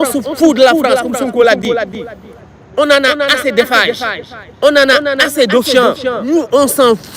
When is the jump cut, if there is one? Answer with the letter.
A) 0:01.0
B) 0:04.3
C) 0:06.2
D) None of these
C